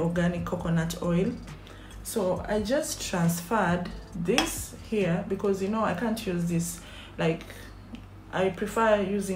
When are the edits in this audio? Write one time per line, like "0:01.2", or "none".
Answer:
none

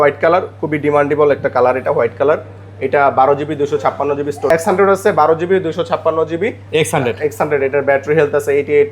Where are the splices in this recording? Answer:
0:04.5

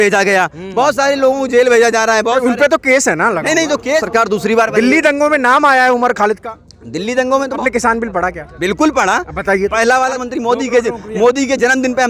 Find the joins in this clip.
0:04.0
0:07.6
0:10.2

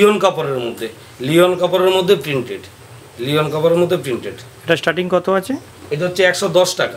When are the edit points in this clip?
none

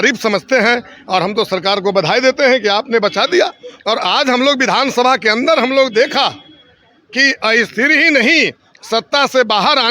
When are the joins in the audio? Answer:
none

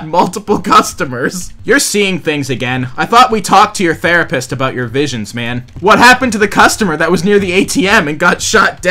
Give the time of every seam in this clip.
0:05.7

